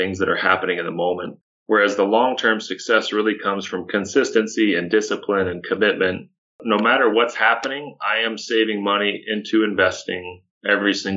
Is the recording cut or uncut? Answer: cut